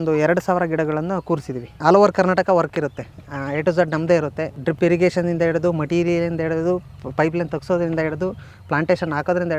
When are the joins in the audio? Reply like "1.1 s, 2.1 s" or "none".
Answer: 1.8 s, 4.5 s